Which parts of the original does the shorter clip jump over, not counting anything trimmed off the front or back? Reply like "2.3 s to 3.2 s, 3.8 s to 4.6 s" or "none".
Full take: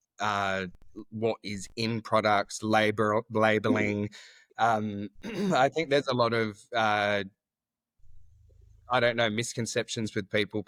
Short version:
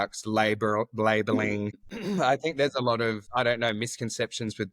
4.2 s to 5.2 s, 6.6 s to 8.8 s